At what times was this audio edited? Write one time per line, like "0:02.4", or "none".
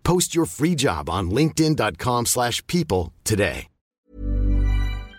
0:04.1